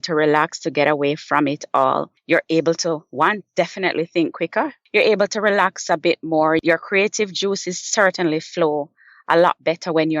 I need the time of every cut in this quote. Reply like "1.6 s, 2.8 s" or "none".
2.1 s, 4.8 s, 6.6 s